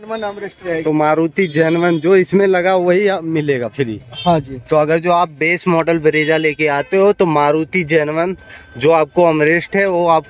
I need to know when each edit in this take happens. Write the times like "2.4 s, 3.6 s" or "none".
none